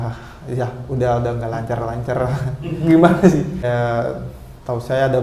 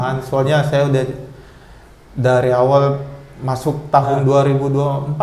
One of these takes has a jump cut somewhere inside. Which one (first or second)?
first